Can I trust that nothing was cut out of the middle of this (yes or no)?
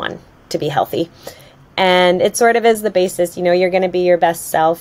yes